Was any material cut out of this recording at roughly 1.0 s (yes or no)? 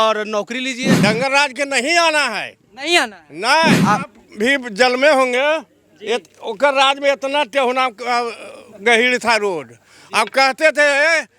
yes